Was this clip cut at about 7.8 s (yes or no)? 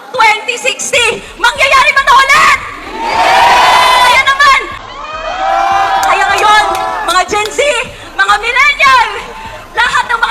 no